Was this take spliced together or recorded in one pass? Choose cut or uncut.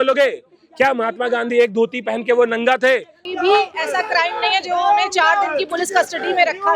cut